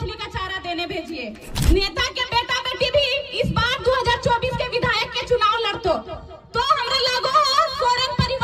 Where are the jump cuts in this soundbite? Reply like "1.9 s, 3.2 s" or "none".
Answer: 1.5 s